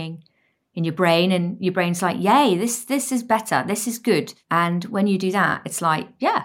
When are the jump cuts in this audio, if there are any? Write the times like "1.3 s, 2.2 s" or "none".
4.4 s